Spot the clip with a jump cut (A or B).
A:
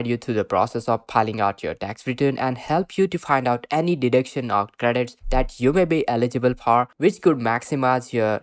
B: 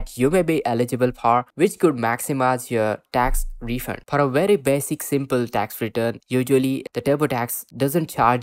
B